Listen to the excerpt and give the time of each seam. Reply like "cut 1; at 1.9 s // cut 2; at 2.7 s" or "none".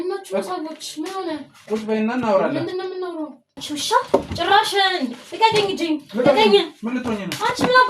cut 1; at 3.5 s